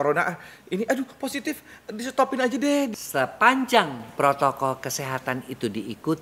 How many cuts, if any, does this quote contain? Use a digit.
1